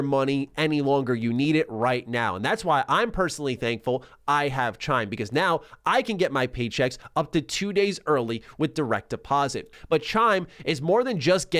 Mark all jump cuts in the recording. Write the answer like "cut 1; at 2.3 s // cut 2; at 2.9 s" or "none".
cut 1; at 9.7 s